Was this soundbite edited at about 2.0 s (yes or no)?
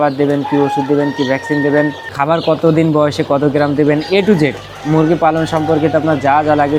no